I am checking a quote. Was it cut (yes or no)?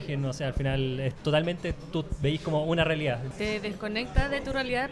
yes